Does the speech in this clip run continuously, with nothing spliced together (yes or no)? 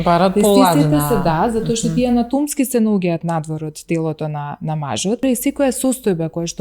no